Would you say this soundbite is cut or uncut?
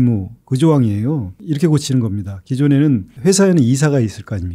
cut